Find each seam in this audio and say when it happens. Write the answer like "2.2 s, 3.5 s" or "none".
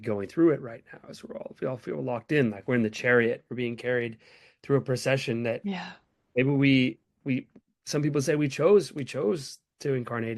none

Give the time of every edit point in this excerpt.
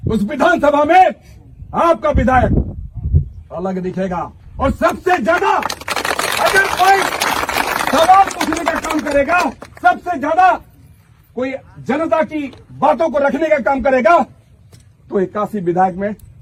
none

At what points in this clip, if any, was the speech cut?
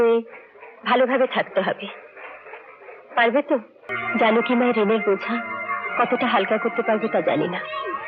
3.9 s

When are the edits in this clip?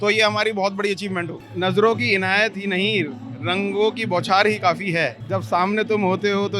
1.4 s, 5.2 s

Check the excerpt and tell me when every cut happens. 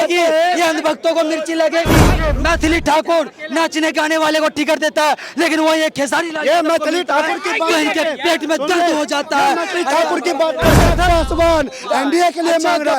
2.1 s, 10.9 s

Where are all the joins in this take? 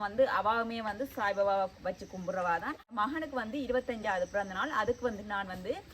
2.9 s

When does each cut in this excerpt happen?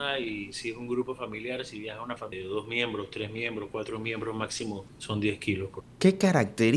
2.3 s, 4.9 s, 5.8 s

